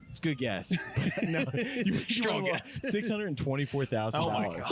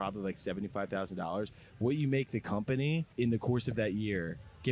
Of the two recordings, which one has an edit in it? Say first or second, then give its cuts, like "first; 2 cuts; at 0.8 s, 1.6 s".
second; 1 cut; at 3.1 s